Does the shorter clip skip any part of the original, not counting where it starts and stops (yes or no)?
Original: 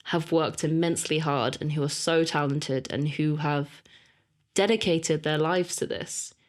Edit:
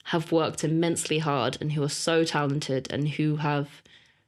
no